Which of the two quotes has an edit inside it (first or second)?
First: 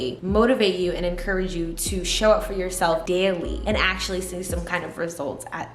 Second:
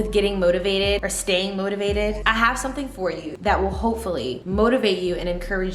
second